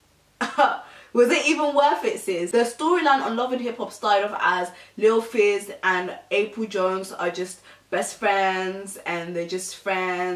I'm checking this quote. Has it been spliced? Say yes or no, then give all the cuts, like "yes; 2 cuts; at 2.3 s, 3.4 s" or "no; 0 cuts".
no; 0 cuts